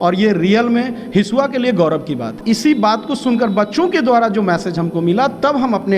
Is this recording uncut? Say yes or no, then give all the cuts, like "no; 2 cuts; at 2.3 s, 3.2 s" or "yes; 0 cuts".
no; 1 cut; at 2.4 s